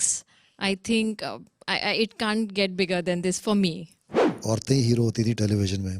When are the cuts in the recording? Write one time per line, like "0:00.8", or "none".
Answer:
0:04.2